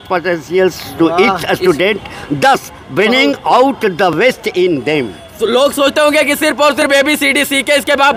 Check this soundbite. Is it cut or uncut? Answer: uncut